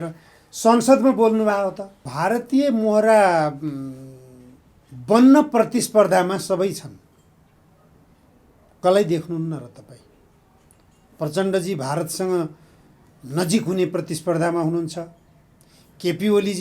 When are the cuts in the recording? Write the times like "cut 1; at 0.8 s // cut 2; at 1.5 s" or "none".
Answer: cut 1; at 2.0 s